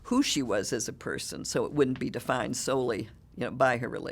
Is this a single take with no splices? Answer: yes; 0 cuts

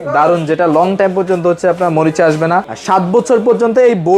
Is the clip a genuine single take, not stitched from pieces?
no; 1 cut; at 2.8 s

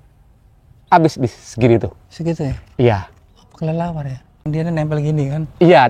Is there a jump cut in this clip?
yes; 1 cut; at 4.4 s

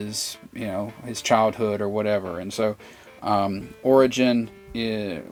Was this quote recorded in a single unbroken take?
yes; 0 cuts

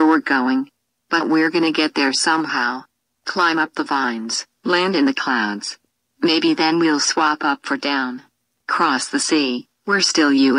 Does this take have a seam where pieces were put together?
no; 0 cuts

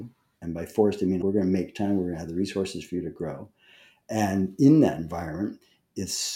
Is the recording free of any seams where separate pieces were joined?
no; 1 cut; at 1.2 s

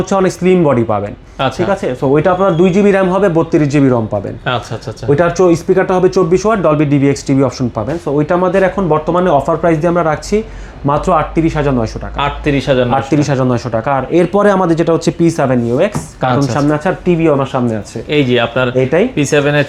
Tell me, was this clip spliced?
no; 0 cuts

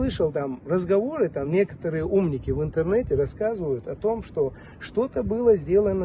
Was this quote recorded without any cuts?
yes; 0 cuts

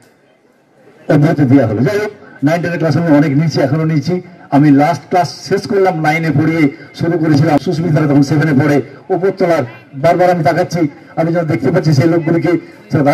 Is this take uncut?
no; 1 cut; at 7.6 s

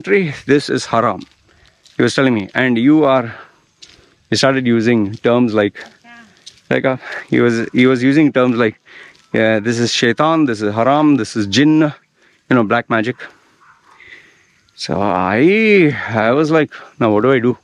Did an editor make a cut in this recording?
no; 0 cuts

